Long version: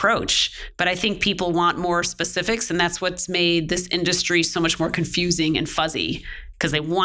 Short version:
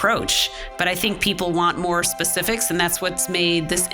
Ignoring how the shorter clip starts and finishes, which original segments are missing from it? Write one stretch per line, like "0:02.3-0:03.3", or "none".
none